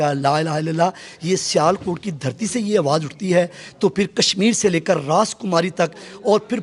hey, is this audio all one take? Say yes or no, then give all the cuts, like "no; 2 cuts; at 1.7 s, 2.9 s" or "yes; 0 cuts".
yes; 0 cuts